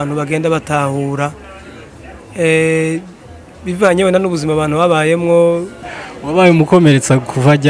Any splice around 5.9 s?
yes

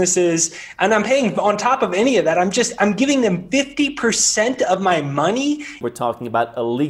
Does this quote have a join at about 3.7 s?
no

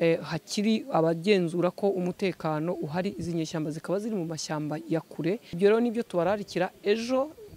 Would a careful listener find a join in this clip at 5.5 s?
yes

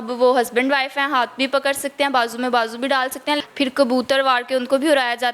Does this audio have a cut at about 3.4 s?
yes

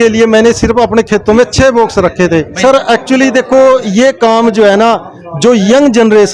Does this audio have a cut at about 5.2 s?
no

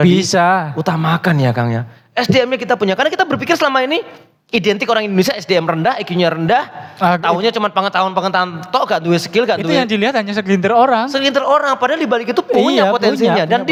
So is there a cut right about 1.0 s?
no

